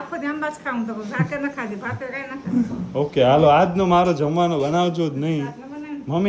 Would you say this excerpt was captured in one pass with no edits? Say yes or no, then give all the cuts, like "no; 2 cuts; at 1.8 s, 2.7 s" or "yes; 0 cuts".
yes; 0 cuts